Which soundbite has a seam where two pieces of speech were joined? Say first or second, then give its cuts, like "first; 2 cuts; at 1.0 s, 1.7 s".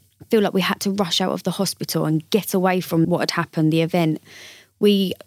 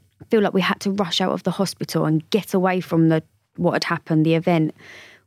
first; 1 cut; at 3.1 s